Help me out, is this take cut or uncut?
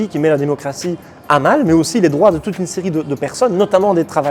uncut